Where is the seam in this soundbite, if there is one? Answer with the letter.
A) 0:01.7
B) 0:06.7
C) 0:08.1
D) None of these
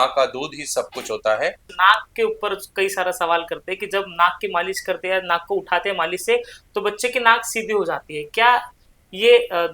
A